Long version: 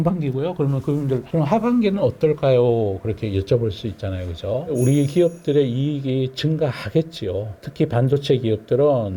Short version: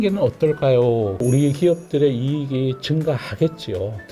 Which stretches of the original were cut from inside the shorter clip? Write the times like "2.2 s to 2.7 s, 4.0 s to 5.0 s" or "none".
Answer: 3.0 s to 4.7 s